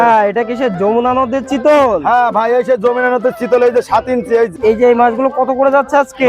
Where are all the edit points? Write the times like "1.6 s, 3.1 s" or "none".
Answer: 4.6 s